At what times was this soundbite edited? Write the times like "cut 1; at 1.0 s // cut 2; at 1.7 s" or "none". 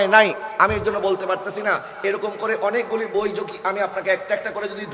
none